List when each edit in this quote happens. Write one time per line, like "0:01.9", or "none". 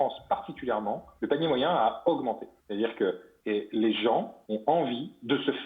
0:01.1
0:02.5
0:03.3
0:04.4